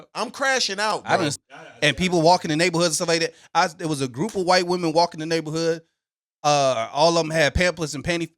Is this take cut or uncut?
cut